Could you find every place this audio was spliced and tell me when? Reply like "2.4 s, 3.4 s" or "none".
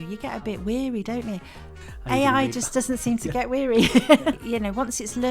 4.4 s